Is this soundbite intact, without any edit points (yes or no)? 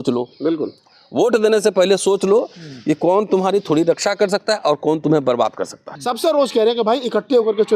no